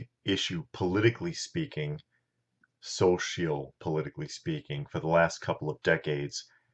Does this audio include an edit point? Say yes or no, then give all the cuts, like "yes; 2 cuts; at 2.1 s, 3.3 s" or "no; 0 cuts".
no; 0 cuts